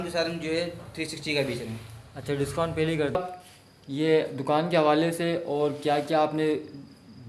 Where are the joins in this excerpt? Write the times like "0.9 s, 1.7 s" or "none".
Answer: 3.2 s